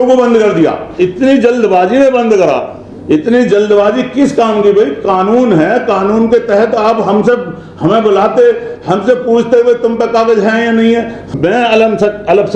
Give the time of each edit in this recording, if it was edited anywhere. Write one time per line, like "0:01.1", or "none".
0:11.3